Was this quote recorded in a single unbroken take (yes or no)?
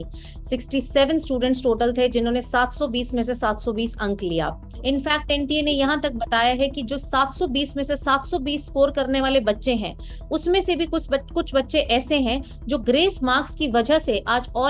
no